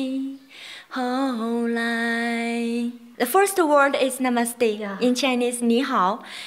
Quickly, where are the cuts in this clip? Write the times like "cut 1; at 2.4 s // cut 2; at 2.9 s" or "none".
cut 1; at 3.0 s